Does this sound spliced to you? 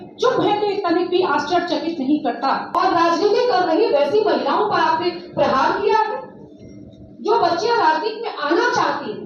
yes; 1 cut; at 2.7 s

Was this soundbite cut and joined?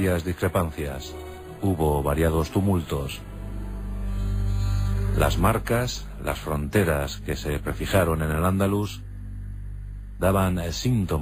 yes; 1 cut; at 5.6 s

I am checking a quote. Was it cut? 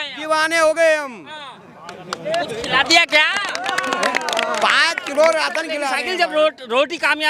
yes; 1 cut; at 6.0 s

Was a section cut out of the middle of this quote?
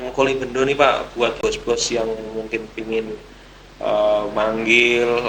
yes; 1 cut; at 1.4 s

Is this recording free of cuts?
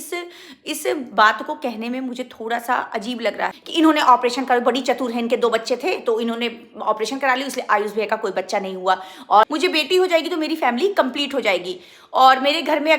no; 2 cuts; at 3.6 s, 9.5 s

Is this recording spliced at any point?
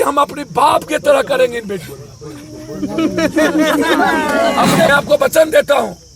yes; 1 cut; at 4.9 s

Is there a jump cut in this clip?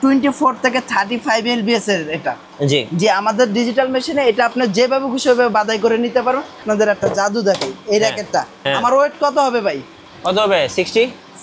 yes; 1 cut; at 6.6 s

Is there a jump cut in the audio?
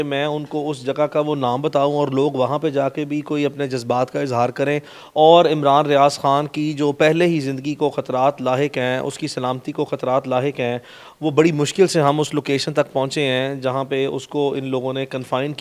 no; 0 cuts

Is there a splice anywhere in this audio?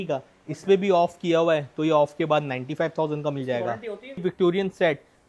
yes; 1 cut; at 4.2 s

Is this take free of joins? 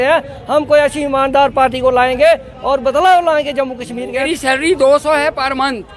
no; 1 cut; at 4.3 s

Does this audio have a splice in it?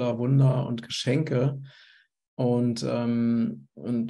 no; 0 cuts

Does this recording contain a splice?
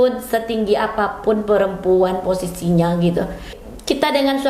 yes; 1 cut; at 3.6 s

